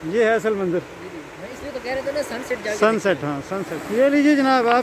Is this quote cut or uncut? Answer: cut